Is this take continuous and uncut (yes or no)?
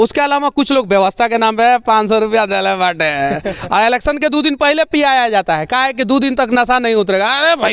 yes